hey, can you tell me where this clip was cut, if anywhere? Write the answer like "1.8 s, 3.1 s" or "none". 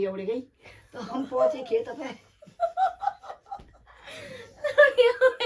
none

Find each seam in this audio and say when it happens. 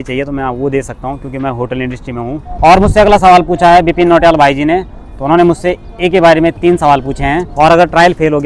2.5 s, 7.5 s

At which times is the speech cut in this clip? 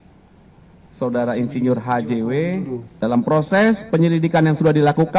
2.8 s

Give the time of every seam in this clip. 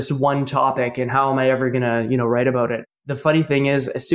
2.8 s

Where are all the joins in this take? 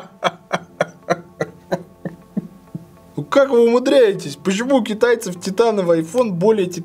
3.0 s

